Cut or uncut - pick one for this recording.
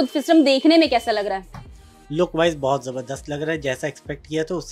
uncut